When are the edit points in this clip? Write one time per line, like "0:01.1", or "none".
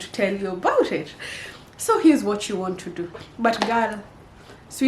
0:03.1